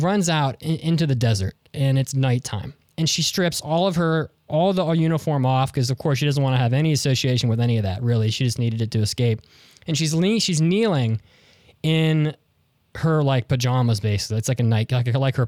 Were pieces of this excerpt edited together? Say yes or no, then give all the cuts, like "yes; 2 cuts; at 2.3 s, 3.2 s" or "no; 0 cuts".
no; 0 cuts